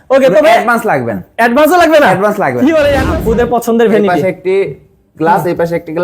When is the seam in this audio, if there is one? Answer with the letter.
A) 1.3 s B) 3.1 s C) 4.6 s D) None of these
B